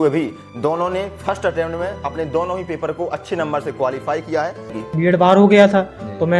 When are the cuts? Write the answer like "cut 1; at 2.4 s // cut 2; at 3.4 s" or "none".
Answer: cut 1; at 4.8 s